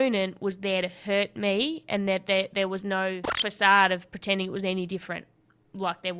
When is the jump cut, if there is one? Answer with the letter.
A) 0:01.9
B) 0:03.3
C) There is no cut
B